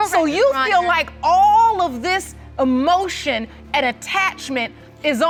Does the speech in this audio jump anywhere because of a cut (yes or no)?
no